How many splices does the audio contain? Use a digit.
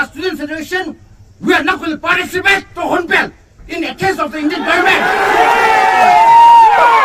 0